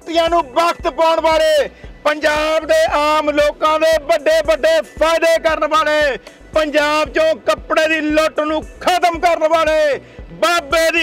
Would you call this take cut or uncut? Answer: uncut